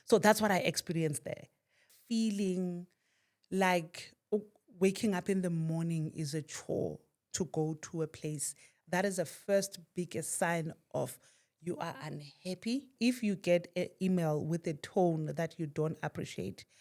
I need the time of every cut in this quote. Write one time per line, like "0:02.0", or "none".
0:01.8
0:12.9